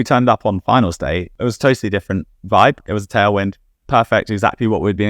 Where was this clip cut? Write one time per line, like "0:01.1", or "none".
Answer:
0:01.3
0:02.8